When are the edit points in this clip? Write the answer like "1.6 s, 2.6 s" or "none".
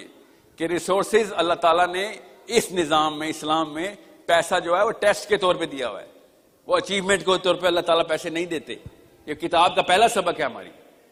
none